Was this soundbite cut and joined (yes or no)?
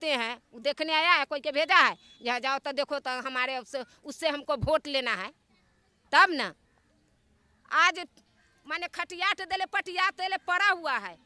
no